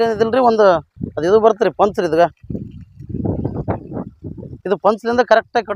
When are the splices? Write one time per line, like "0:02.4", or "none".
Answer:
none